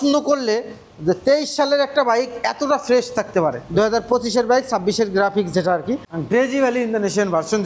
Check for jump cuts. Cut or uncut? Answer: cut